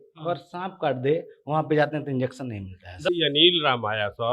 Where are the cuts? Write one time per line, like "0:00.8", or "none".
0:03.1